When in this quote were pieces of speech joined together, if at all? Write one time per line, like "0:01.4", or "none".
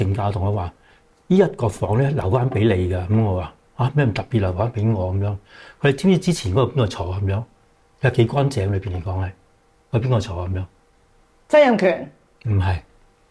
none